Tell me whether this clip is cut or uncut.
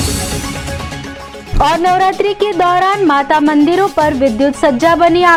uncut